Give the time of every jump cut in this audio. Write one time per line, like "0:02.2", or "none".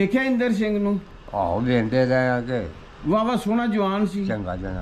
none